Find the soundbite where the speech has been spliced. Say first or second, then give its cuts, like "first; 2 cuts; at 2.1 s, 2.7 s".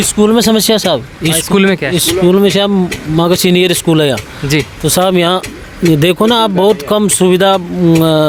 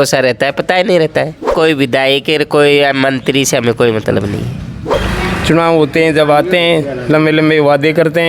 second; 2 cuts; at 1.5 s, 4.9 s